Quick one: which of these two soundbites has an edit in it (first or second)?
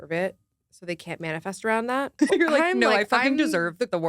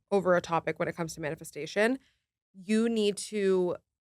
first